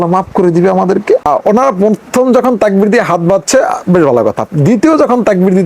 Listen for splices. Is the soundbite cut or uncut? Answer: cut